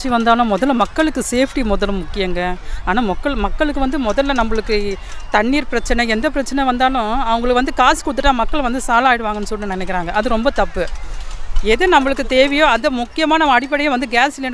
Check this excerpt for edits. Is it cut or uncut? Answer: uncut